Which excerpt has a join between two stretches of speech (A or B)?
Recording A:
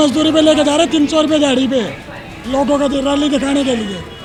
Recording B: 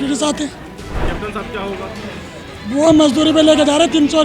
B